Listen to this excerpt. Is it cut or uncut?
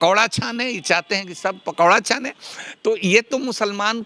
uncut